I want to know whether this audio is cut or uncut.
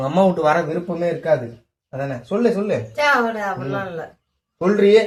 uncut